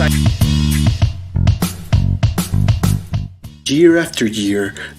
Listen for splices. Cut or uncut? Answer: cut